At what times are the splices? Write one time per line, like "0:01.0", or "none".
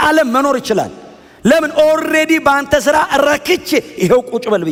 none

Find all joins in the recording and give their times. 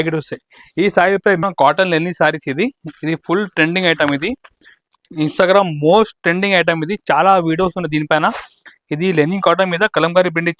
0:01.4

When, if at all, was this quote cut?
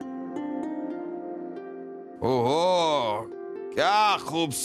0:02.1

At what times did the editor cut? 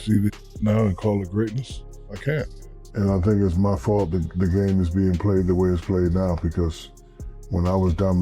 0:02.6

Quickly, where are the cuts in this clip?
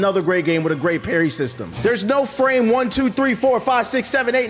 0:01.6

